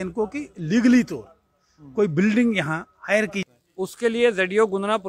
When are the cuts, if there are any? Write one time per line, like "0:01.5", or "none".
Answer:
0:03.4